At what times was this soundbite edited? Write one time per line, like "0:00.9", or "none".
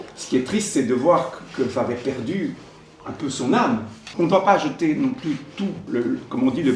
0:04.0
0:05.8